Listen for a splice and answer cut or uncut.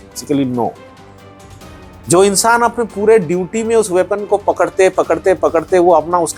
uncut